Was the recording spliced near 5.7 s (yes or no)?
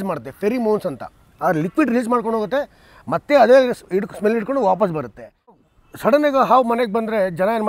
yes